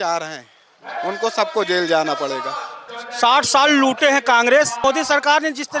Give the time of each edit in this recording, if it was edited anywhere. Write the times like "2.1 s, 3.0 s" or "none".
3.0 s, 4.8 s